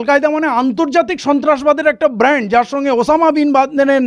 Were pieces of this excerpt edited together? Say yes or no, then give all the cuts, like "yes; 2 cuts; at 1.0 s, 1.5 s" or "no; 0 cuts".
no; 0 cuts